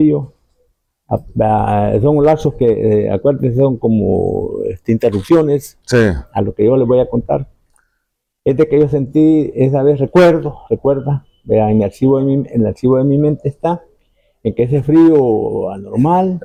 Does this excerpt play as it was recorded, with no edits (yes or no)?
yes